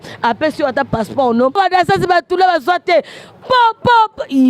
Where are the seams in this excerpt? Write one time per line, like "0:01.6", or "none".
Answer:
0:01.6